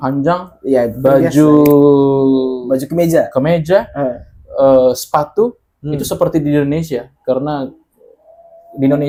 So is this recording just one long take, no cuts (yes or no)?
yes